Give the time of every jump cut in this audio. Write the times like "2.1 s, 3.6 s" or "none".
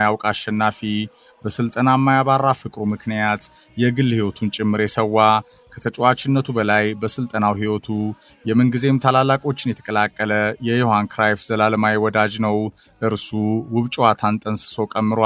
none